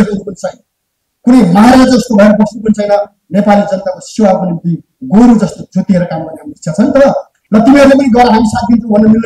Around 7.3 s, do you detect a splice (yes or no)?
yes